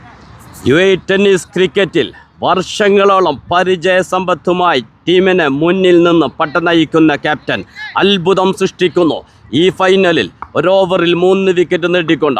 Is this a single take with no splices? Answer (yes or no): yes